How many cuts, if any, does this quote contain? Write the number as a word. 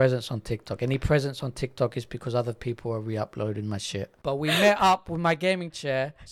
one